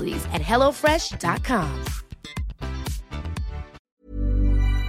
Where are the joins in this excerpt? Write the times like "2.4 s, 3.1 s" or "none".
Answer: 3.8 s